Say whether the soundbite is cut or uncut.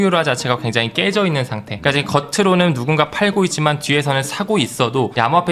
uncut